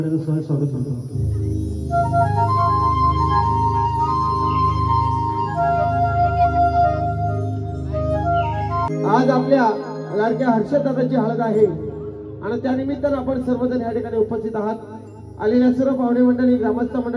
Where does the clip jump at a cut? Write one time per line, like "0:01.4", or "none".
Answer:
none